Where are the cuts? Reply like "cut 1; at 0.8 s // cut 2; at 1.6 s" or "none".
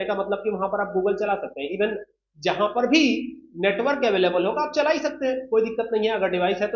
none